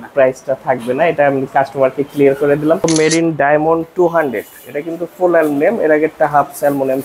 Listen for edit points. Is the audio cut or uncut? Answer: cut